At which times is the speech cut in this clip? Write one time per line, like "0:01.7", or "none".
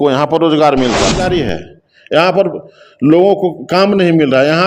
0:01.2